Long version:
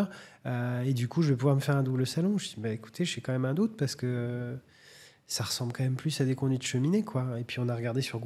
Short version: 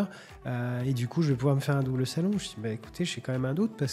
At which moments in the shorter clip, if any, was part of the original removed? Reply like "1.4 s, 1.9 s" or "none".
none